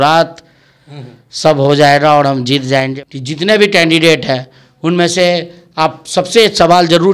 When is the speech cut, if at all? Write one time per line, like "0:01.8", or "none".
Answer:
0:02.9